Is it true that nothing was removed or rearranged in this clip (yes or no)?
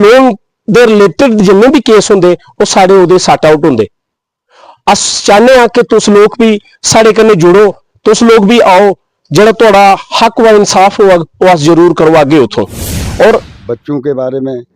no